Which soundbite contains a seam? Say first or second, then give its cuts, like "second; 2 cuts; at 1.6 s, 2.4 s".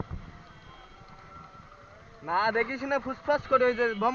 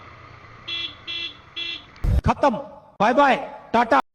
second; 1 cut; at 2.1 s